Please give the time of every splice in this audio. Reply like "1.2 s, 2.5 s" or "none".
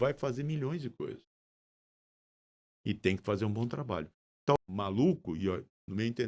4.6 s